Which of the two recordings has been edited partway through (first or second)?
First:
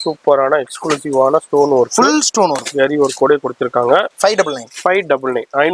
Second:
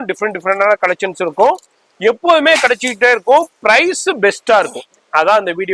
first